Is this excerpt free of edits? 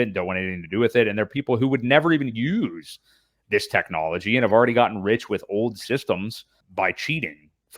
no; 1 cut; at 6.6 s

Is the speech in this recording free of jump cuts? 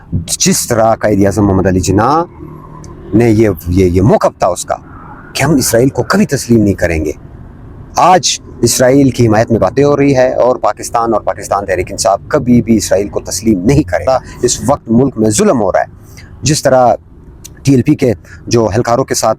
no; 1 cut; at 14.1 s

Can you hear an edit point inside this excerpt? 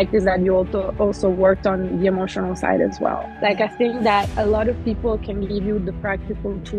yes; 1 cut; at 3.2 s

